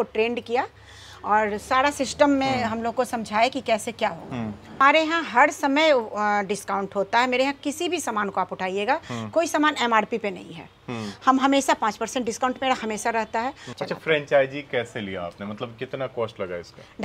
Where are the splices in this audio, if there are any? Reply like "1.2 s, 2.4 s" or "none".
4.8 s, 13.7 s